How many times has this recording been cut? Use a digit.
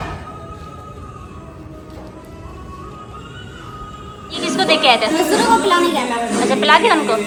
0